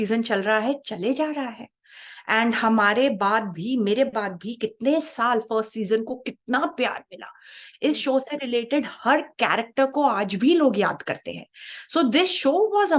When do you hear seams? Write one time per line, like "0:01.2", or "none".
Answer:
none